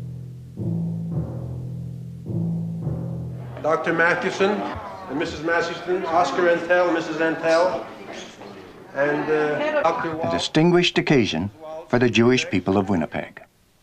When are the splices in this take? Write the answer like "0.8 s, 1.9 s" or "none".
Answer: 5.1 s